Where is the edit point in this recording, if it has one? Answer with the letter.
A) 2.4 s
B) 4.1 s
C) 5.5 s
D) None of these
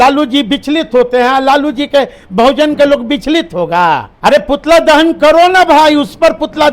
B